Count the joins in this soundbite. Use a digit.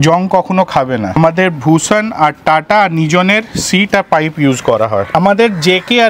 2